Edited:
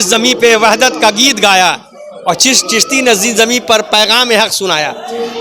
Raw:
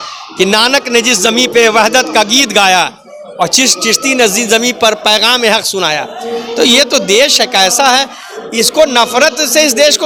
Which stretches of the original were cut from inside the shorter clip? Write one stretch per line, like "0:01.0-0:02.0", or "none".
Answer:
none